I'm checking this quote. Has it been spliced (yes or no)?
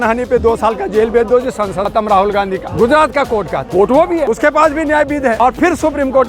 yes